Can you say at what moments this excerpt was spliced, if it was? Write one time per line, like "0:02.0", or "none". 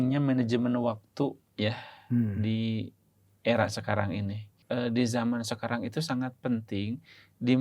0:04.6